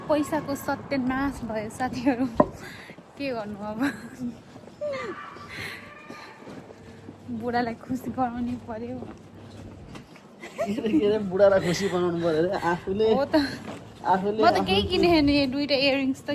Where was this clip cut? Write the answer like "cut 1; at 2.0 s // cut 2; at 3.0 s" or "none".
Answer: none